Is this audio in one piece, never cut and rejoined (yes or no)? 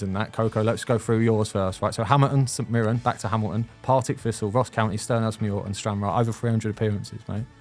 yes